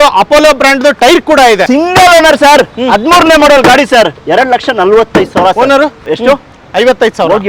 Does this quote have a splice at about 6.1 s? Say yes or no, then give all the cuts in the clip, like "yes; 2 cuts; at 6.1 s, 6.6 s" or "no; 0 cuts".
yes; 3 cuts; at 1.6 s, 4.2 s, 6.1 s